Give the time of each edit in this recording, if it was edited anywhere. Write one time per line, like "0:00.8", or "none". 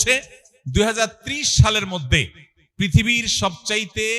none